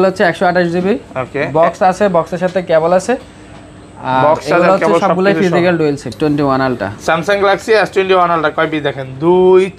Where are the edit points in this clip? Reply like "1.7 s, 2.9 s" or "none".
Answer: 6.1 s